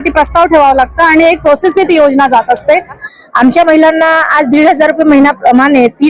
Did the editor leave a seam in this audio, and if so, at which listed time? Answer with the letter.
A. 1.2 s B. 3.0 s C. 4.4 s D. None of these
B